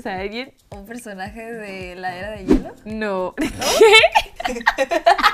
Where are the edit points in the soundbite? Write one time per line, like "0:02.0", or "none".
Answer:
none

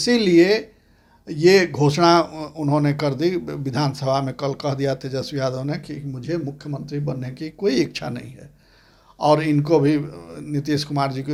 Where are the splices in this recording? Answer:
none

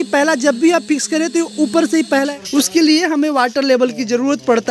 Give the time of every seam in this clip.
0:02.3

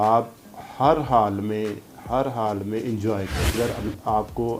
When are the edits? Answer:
0:03.5

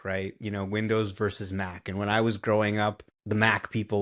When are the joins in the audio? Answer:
0:03.1

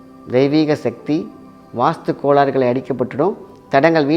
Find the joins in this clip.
none

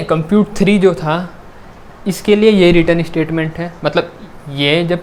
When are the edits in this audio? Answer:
none

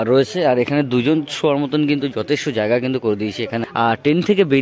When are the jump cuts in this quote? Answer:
0:03.6

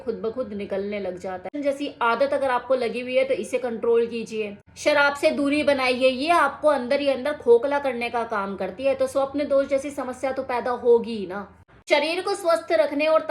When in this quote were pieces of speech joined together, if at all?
0:01.5
0:11.7

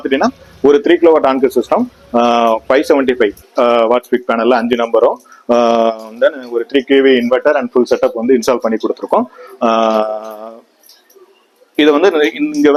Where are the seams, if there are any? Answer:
none

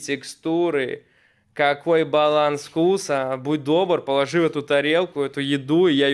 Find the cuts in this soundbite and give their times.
none

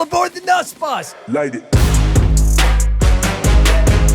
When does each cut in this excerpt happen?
0:01.1

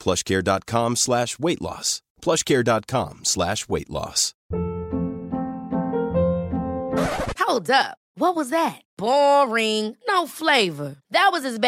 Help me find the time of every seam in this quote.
0:04.3

